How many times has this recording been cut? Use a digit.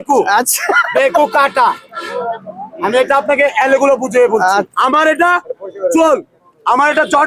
1